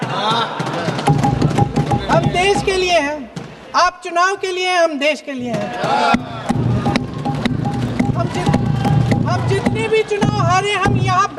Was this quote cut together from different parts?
no; 0 cuts

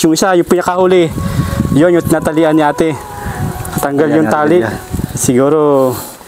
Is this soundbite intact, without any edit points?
yes; 0 cuts

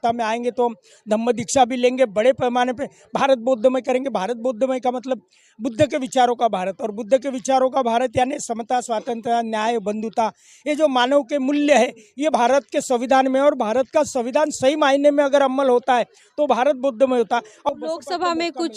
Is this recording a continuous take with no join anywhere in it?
no; 1 cut; at 17.5 s

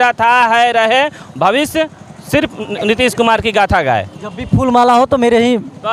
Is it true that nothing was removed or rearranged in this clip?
yes; 0 cuts

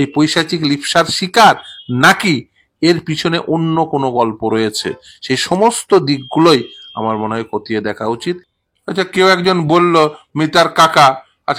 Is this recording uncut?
no; 1 cut; at 8.5 s

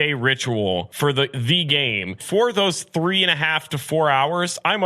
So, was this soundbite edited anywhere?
yes; 2 cuts; at 0.9 s, 2.2 s

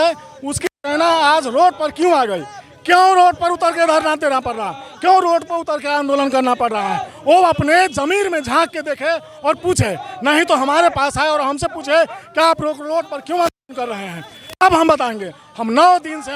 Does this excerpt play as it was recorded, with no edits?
yes; 0 cuts

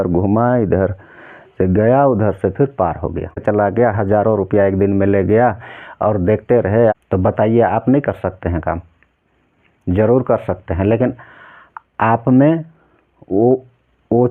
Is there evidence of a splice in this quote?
yes; 2 cuts; at 3.4 s, 6.9 s

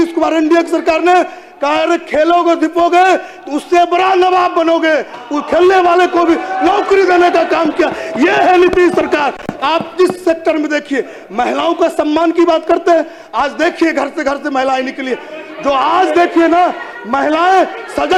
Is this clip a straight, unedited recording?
yes; 0 cuts

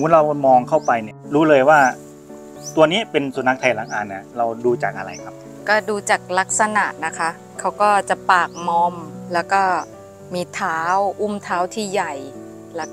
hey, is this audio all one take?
no; 1 cut; at 1.1 s

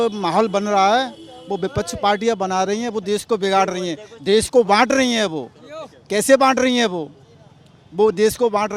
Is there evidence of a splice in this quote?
no; 0 cuts

